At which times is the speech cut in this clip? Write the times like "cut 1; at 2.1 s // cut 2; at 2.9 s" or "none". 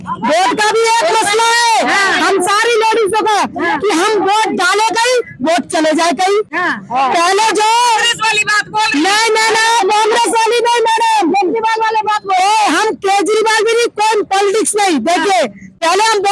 none